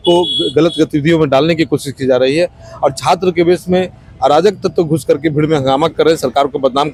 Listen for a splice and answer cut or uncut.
uncut